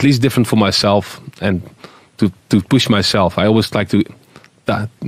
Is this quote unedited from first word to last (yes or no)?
yes